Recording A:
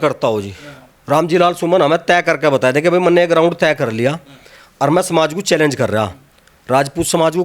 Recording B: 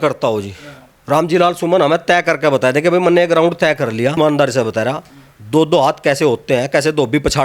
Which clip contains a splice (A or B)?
B